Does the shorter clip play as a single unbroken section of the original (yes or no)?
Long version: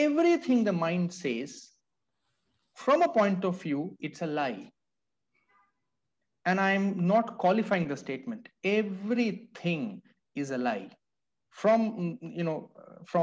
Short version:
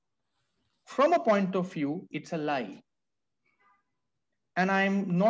yes